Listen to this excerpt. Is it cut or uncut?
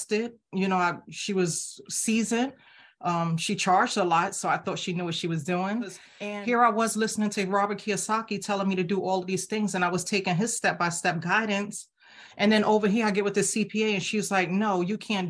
cut